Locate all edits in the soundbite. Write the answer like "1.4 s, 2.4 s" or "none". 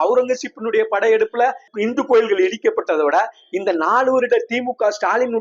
1.7 s

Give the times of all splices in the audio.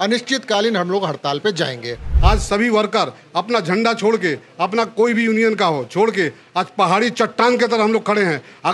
2.1 s

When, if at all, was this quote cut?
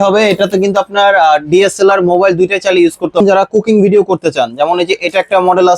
3.2 s

